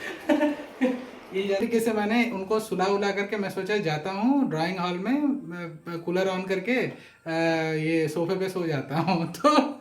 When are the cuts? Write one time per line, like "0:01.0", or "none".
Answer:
0:01.6